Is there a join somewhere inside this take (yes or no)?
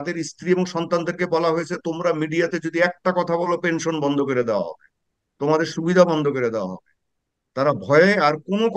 no